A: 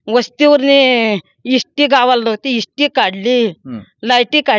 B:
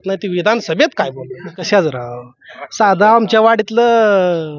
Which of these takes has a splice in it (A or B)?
B